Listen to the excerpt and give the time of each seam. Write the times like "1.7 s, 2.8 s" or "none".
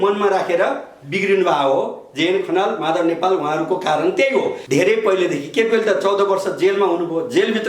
4.6 s